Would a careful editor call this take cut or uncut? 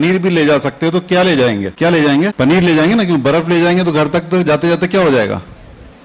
cut